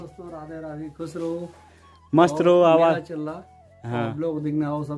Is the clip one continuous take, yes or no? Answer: yes